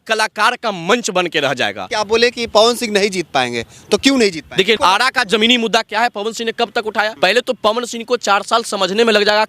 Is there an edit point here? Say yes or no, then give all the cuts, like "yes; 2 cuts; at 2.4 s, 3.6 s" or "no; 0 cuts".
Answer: yes; 3 cuts; at 1.8 s, 4.8 s, 7.1 s